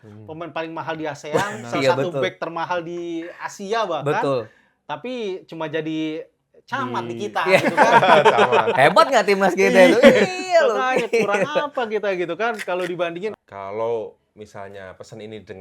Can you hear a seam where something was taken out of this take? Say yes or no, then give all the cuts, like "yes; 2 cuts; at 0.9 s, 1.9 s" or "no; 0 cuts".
yes; 1 cut; at 13.4 s